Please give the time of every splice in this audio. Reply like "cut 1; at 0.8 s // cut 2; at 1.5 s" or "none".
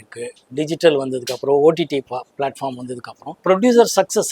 cut 1; at 3.3 s